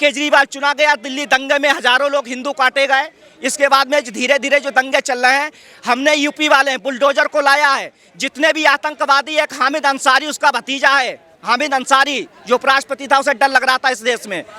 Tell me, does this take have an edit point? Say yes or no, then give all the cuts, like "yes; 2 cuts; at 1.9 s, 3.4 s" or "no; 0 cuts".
no; 0 cuts